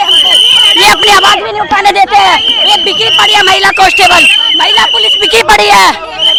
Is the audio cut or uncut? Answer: uncut